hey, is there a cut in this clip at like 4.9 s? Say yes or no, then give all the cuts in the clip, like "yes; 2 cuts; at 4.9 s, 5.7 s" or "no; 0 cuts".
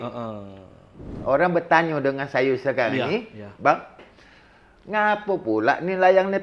no; 1 cut; at 1.1 s